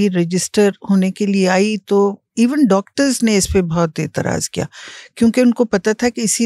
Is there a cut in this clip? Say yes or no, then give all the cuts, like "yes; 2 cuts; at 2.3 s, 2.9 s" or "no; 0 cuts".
no; 0 cuts